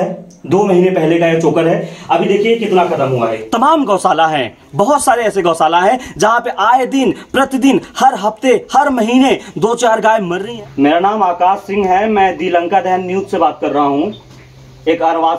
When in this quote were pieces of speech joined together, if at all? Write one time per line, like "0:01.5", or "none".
0:03.4
0:10.4

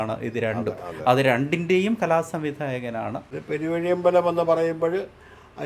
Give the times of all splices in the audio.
0:03.3

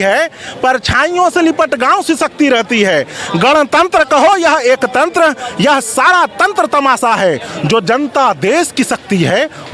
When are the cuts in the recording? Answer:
none

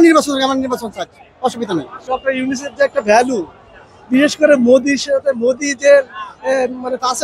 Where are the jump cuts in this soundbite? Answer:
0:02.0

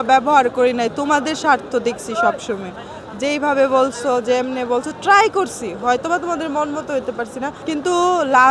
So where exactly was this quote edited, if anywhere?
0:07.6

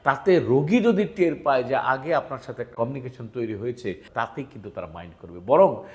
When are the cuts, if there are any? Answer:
0:02.7
0:04.0

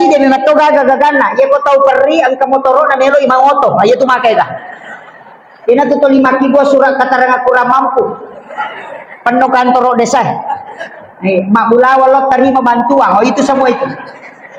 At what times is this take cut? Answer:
none

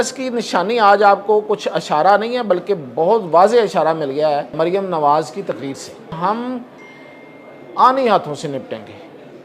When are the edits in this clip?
0:04.5
0:06.2

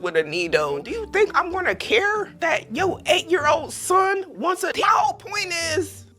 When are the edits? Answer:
0:00.9
0:04.7

